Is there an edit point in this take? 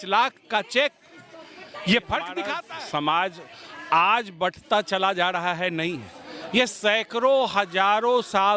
yes; 1 cut; at 2.6 s

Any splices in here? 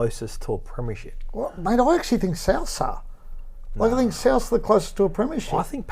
no; 0 cuts

